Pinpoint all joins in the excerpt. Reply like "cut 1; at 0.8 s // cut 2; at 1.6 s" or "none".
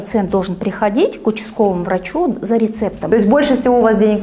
cut 1; at 3.0 s